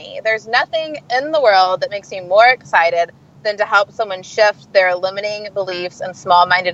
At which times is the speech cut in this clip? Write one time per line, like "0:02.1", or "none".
none